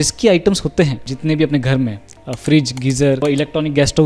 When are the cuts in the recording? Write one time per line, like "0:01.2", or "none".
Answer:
0:01.1
0:03.2

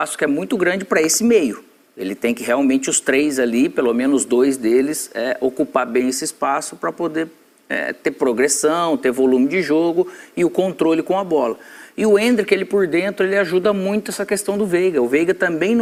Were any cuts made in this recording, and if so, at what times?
none

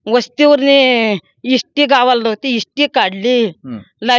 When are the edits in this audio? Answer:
none

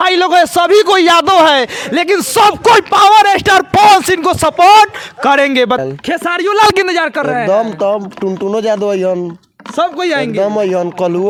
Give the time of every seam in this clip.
none

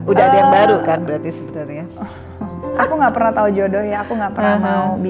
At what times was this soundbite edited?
0:02.8

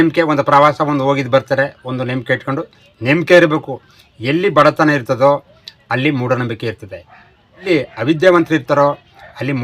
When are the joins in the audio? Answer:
0:07.6

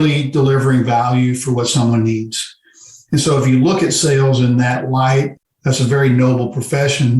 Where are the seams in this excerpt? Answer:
0:05.3

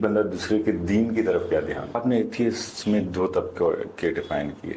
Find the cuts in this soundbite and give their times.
0:01.9

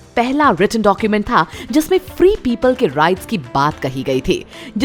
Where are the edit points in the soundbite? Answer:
none

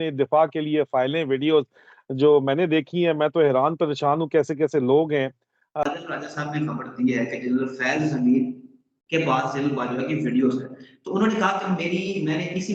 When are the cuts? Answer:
0:05.8

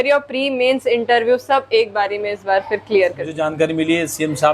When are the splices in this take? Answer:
0:03.4

